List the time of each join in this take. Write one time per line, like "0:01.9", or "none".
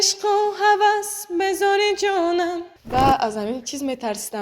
0:02.7